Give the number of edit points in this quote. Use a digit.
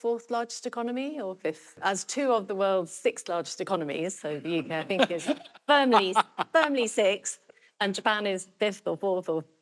1